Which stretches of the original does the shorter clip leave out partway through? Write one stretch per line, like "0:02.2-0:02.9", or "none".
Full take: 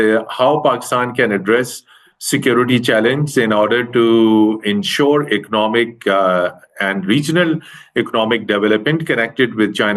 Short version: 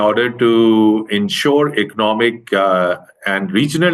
none